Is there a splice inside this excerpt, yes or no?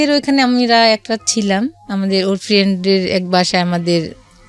no